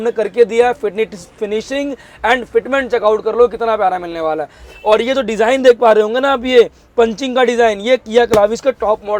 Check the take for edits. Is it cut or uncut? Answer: uncut